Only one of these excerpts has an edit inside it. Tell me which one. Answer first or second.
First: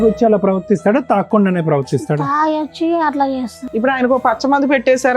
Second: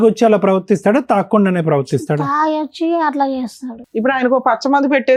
first